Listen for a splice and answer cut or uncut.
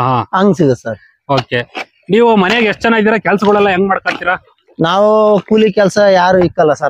uncut